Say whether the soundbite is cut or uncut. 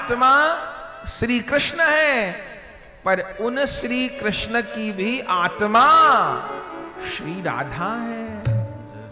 uncut